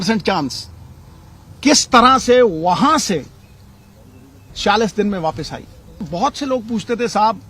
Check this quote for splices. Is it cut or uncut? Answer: cut